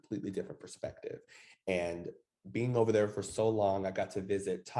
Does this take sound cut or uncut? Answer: uncut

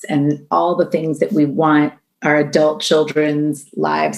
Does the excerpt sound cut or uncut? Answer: uncut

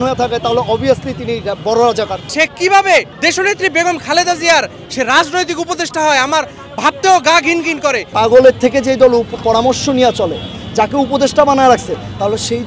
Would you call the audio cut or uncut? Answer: cut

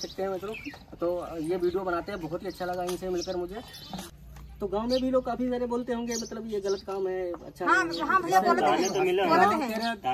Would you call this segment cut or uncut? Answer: cut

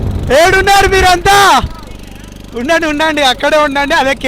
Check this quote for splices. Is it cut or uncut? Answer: uncut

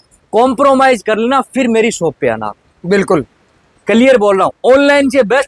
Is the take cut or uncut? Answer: uncut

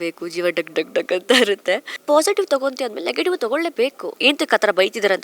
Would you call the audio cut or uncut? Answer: cut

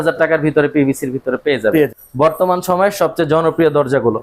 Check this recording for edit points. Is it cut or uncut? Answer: cut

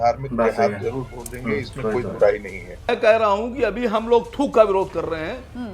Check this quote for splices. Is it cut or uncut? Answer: cut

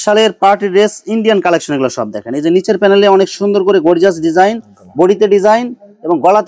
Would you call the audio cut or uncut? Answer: uncut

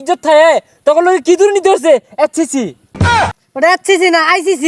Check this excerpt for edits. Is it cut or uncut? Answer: cut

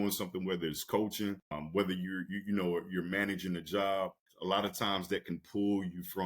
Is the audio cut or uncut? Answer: cut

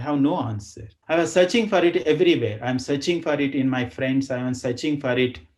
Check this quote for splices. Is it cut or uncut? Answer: cut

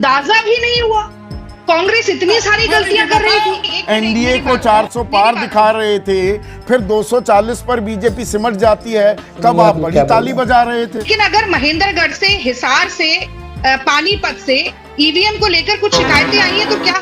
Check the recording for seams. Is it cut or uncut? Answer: cut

